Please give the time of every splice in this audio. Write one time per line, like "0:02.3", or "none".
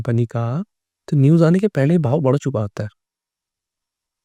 none